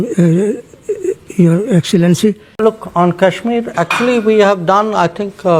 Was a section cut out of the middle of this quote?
yes; 1 cut; at 2.5 s

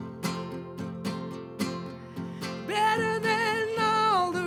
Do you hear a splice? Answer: no; 0 cuts

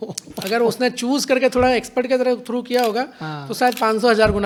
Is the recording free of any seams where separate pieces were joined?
yes; 0 cuts

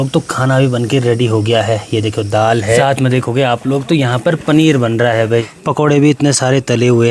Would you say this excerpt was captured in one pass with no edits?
no; 2 cuts; at 2.8 s, 5.6 s

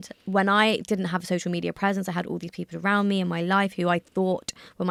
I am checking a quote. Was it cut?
no; 0 cuts

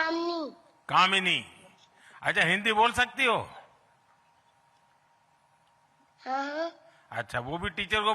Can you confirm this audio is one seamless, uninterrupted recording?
yes; 0 cuts

